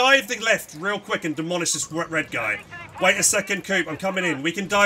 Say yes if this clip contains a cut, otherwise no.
no